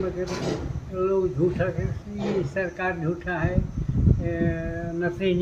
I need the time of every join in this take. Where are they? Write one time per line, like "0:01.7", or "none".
none